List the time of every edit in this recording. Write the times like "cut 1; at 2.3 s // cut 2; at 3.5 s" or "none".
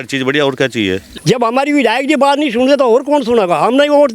cut 1; at 1.1 s